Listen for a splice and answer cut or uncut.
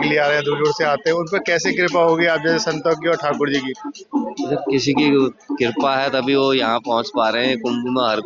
uncut